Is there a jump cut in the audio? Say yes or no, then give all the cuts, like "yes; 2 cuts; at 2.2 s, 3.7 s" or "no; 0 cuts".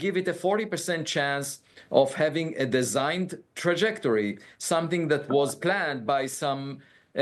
no; 0 cuts